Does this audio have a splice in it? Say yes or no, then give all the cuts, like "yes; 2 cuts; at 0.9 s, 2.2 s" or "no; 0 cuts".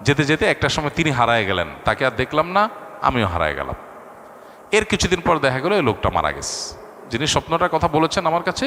no; 0 cuts